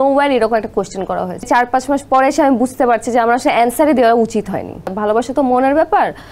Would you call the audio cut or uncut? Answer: cut